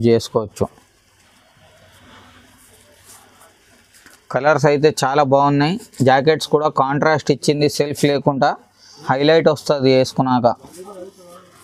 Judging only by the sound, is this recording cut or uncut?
uncut